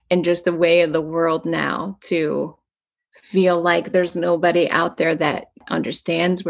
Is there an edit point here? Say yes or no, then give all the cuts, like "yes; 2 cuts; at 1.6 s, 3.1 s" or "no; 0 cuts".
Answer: yes; 1 cut; at 5.6 s